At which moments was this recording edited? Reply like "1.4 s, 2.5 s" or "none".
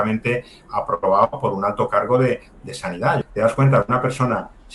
3.2 s